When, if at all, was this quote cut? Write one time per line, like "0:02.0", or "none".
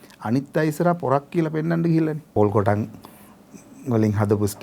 0:02.3